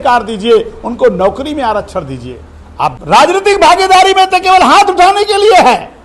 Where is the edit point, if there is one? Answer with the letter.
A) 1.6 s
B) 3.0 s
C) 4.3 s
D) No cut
B